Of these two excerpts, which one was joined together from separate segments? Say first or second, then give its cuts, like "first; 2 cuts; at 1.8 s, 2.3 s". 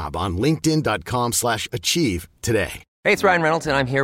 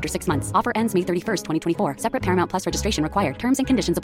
first; 1 cut; at 2.8 s